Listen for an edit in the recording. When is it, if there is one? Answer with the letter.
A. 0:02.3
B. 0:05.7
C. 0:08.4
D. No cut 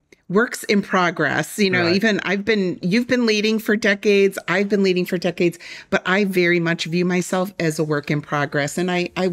D